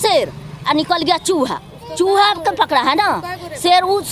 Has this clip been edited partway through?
no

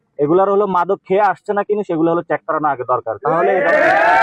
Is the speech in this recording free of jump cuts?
yes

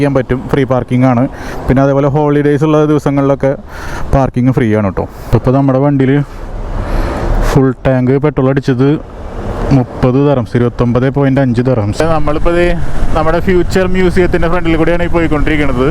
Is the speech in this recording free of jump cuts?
no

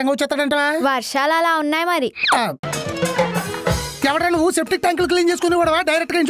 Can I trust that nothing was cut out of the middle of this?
no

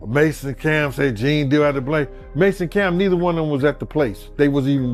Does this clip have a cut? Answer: no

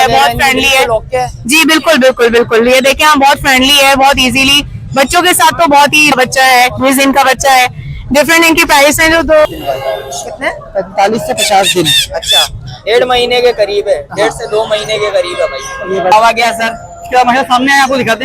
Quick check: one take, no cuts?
no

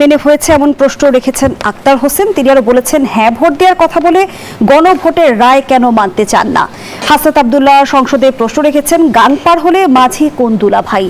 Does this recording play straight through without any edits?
yes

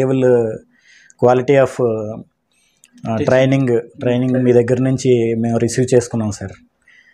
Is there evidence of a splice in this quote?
no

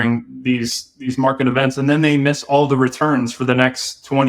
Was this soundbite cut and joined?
no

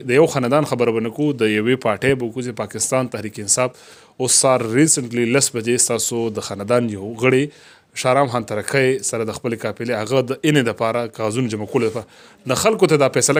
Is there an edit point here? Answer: no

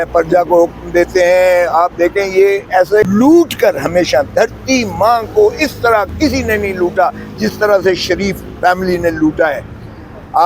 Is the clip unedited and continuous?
no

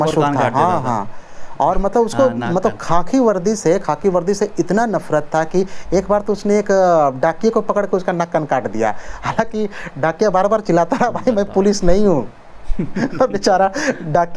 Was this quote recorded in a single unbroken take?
yes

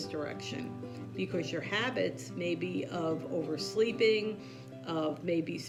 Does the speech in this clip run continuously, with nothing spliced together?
yes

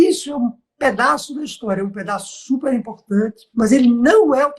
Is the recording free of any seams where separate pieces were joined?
no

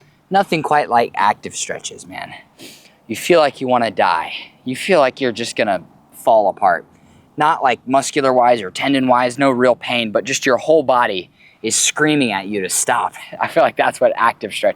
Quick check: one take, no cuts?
yes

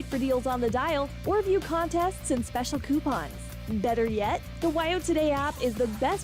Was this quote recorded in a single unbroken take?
yes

